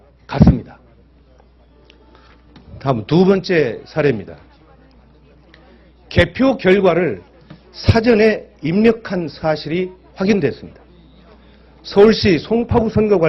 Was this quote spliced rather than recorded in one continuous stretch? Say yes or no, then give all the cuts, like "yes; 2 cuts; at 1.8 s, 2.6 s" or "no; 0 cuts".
no; 0 cuts